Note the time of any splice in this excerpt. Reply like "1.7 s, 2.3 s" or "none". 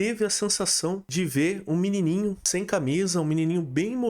1.1 s, 2.4 s